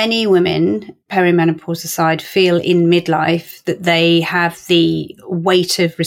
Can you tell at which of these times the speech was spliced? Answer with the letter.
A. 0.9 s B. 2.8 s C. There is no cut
A